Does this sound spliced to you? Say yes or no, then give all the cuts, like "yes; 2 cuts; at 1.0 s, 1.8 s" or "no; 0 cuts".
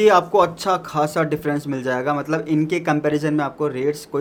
no; 0 cuts